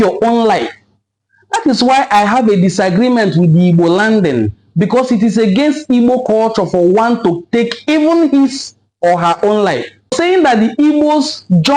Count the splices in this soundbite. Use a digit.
1